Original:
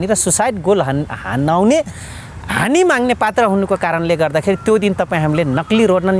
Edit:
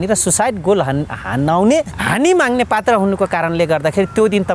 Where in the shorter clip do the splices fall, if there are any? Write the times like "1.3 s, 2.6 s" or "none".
2.0 s